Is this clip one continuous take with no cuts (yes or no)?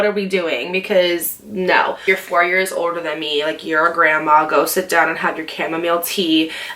no